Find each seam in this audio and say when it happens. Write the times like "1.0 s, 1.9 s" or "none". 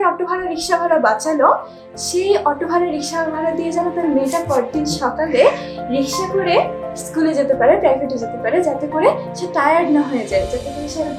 none